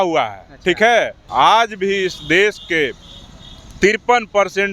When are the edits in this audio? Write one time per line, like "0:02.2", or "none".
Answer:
0:01.2